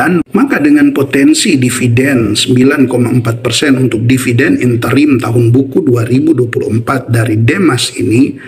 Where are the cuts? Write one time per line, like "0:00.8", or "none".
none